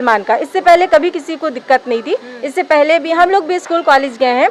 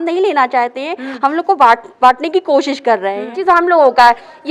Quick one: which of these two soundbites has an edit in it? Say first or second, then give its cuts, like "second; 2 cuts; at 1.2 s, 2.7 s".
second; 1 cut; at 3.4 s